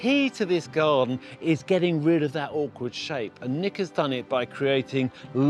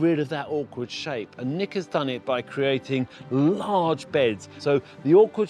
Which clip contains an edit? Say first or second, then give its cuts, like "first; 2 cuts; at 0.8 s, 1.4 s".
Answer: second; 1 cut; at 4.5 s